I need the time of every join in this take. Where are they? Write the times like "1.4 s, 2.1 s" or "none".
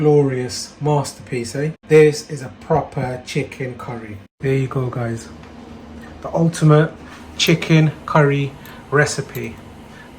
1.8 s, 4.2 s